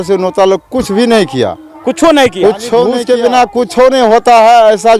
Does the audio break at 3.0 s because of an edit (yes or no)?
yes